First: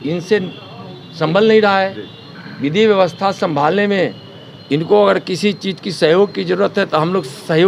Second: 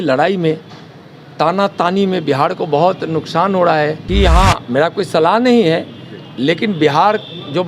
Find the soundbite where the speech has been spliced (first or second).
second